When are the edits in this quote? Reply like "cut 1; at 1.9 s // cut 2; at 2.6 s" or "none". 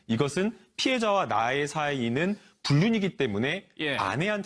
cut 1; at 3.4 s

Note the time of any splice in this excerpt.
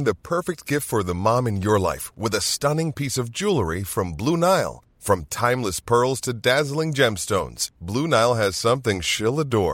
none

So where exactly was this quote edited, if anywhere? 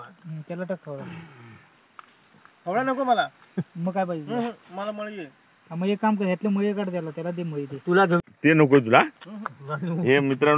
cut 1; at 8.2 s

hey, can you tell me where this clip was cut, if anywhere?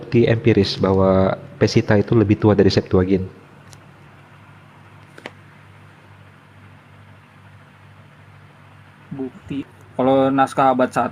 cut 1; at 9.7 s

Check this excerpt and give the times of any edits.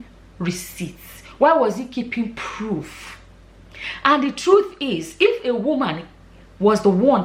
none

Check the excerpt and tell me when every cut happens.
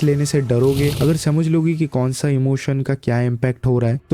cut 1; at 0.9 s

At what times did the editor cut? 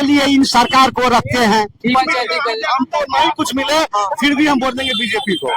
cut 1; at 1.9 s

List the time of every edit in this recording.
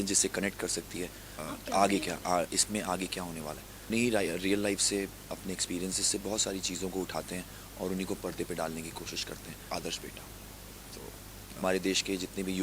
cut 1; at 1.4 s // cut 2; at 3.9 s // cut 3; at 9.7 s // cut 4; at 11.6 s

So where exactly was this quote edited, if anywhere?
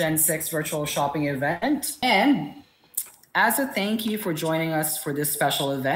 cut 1; at 1.9 s

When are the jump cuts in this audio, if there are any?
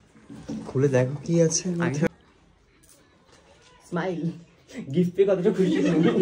cut 1; at 2.1 s

